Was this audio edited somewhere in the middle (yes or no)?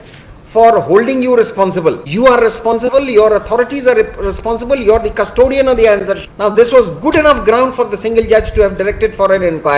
yes